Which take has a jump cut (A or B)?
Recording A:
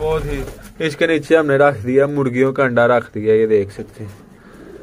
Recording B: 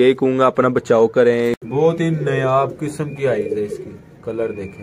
B